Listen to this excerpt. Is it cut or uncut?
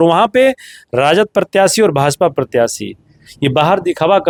uncut